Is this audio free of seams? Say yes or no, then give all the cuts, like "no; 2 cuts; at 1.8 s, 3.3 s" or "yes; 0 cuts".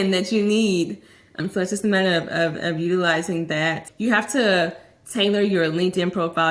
no; 2 cuts; at 1.4 s, 3.9 s